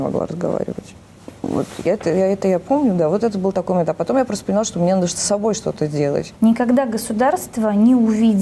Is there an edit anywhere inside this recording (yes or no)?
yes